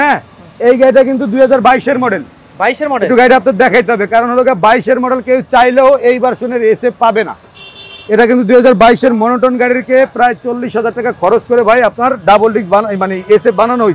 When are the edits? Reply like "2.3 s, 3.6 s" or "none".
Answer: none

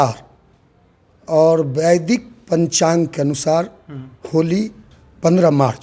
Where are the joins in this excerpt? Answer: none

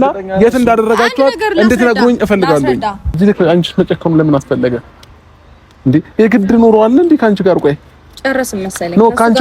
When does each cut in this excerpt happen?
3.2 s

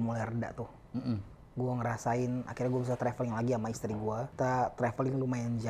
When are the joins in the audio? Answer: 4.3 s

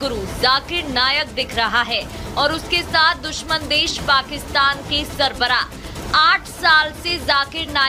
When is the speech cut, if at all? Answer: none

